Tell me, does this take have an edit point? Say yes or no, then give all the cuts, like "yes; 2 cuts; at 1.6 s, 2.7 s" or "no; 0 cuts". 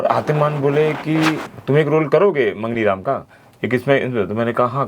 yes; 1 cut; at 1.5 s